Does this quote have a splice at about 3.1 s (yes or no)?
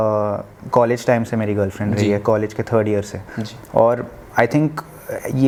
no